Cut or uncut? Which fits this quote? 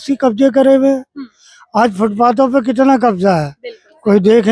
uncut